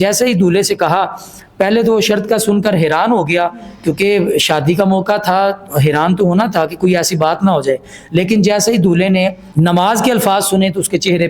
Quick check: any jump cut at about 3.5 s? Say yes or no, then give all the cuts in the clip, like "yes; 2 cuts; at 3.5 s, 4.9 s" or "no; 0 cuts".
no; 0 cuts